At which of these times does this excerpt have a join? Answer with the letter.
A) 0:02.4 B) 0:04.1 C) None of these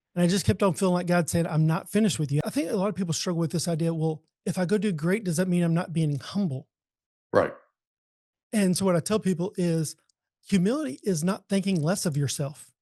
A